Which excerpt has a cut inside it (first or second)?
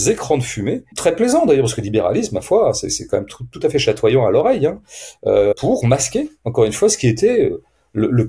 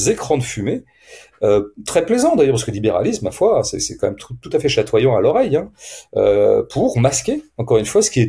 first